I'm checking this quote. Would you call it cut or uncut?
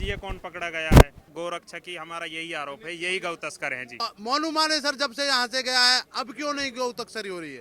cut